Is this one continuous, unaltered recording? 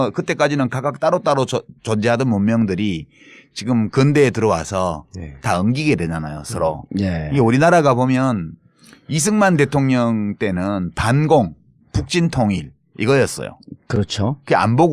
yes; 0 cuts

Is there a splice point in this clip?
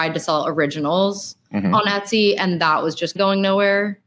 yes; 1 cut; at 3.1 s

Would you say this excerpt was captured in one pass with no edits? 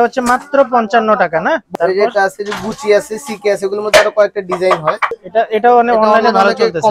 no; 2 cuts; at 1.7 s, 5.1 s

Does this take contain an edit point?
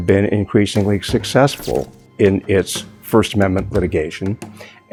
no; 0 cuts

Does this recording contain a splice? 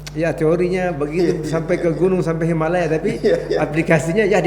no; 0 cuts

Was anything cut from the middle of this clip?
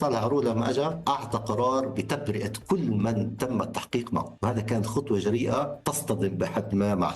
yes; 3 cuts; at 1.0 s, 4.3 s, 5.8 s

